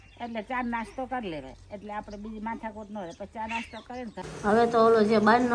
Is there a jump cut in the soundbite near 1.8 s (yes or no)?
no